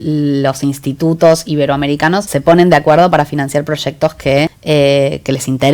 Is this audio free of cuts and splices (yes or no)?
no